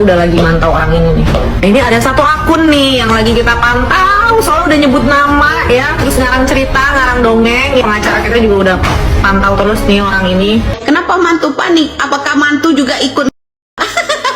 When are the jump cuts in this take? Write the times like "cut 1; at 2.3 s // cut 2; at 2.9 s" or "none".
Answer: cut 1; at 10.7 s

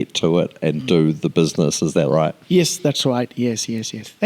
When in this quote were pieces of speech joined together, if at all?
none

